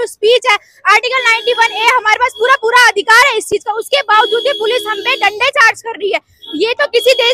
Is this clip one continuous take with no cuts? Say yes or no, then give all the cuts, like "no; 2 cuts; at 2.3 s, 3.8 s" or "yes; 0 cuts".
yes; 0 cuts